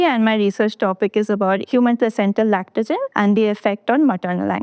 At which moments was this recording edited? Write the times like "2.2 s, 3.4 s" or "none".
1.7 s, 3.1 s